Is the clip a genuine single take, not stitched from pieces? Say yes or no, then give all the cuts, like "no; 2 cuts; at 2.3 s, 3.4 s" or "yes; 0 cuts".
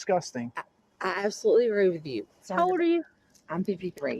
no; 1 cut; at 2.5 s